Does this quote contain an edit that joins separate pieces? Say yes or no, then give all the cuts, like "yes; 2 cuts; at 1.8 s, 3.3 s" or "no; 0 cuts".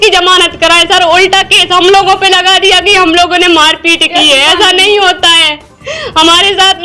no; 0 cuts